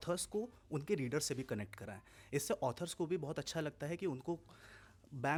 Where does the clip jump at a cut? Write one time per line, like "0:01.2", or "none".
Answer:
none